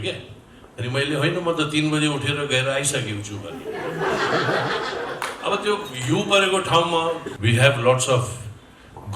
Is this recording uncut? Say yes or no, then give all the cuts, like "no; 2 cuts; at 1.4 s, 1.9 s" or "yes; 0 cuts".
no; 1 cut; at 7.3 s